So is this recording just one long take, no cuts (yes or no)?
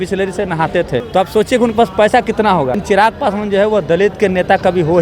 no